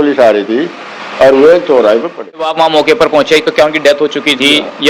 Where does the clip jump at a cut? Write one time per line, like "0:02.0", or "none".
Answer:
0:02.5